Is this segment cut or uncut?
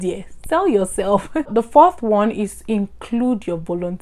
cut